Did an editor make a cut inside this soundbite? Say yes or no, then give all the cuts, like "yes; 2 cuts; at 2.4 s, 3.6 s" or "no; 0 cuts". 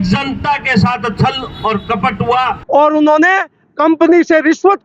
yes; 1 cut; at 2.6 s